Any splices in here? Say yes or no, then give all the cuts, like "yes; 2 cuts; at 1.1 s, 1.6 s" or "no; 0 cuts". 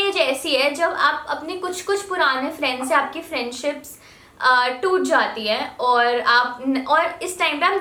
no; 0 cuts